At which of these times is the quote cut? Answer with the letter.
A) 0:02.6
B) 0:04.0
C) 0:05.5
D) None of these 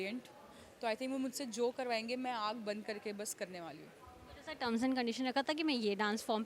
D